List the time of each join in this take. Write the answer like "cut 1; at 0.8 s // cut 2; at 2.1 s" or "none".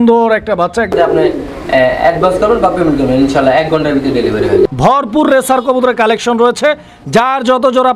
cut 1; at 0.9 s // cut 2; at 4.8 s

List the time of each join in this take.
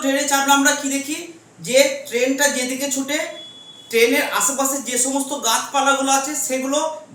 none

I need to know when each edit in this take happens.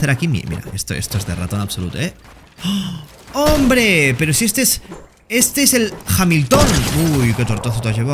none

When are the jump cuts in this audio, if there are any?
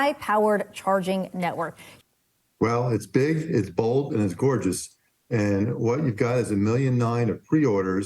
cut 1; at 1.8 s

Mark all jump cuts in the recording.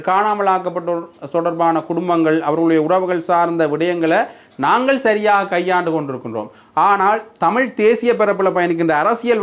none

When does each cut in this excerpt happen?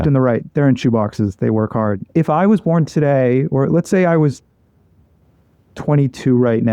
cut 1; at 2.0 s

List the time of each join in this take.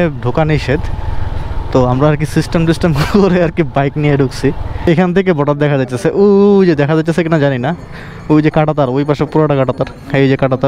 cut 1; at 4.9 s

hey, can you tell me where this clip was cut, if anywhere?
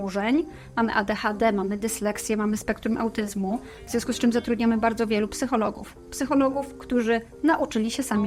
none

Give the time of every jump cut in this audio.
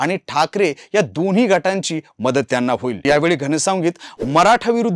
cut 1; at 3.0 s

